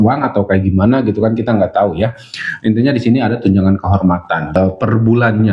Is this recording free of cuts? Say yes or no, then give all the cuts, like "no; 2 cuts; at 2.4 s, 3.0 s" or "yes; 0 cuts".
no; 1 cut; at 4.5 s